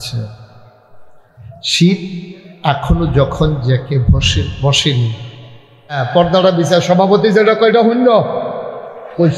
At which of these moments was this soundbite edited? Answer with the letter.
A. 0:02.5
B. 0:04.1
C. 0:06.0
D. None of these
C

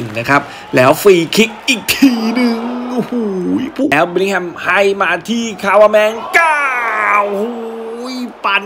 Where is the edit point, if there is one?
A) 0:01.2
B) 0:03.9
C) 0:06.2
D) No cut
B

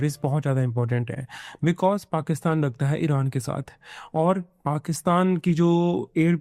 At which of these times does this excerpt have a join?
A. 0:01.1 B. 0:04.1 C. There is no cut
C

